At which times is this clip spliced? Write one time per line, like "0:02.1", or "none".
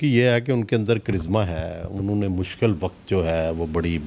none

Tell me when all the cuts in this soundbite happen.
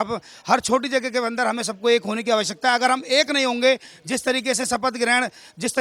none

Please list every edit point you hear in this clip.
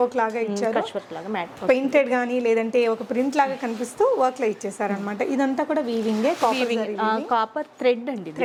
none

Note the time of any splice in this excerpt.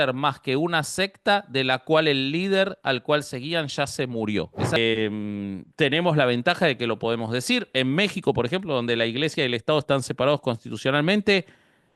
0:04.8

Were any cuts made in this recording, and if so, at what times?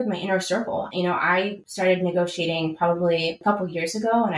0:01.6
0:03.4

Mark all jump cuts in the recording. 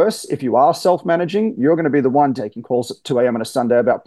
0:02.4

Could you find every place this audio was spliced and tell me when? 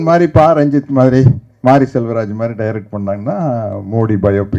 none

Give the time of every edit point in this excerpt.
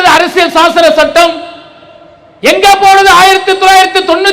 none

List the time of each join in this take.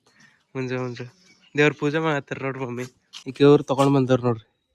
0:03.2

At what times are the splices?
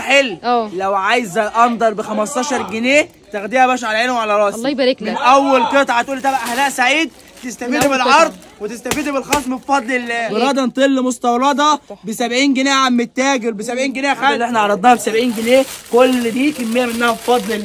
0:10.1
0:14.4

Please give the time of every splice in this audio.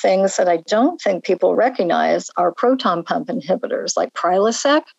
0:01.5

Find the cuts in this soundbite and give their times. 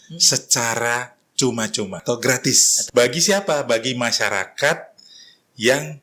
0:02.0
0:02.7

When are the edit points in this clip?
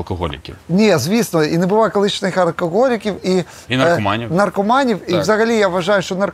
none

